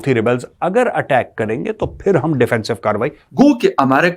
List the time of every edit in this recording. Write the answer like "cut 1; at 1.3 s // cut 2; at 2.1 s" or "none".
cut 1; at 3.2 s

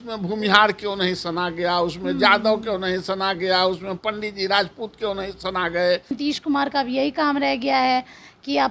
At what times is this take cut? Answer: cut 1; at 6.2 s

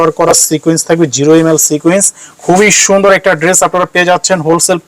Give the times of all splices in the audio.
none

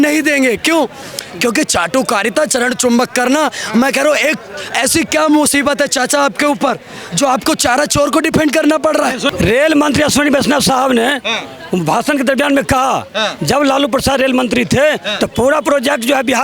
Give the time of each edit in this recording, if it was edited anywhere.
cut 1; at 9.3 s

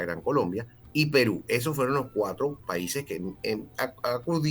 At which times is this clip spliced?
none

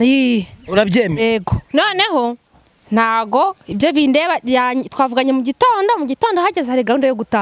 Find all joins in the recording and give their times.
none

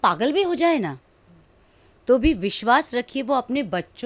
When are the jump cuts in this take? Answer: none

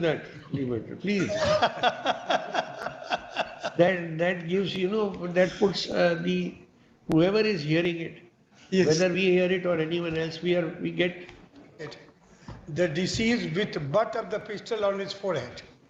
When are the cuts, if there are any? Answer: cut 1; at 11.8 s

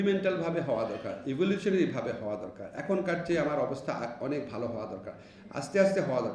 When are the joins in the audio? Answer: none

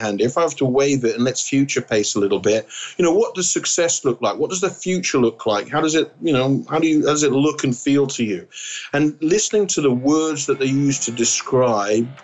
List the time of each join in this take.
none

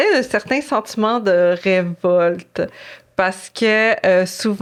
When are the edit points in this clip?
none

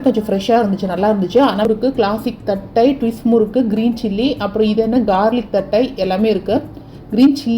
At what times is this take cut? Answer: cut 1; at 1.6 s

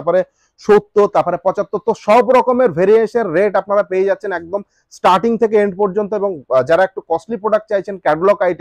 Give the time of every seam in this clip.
none

